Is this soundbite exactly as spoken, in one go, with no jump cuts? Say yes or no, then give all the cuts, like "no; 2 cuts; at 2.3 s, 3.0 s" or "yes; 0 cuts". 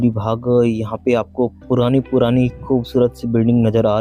yes; 0 cuts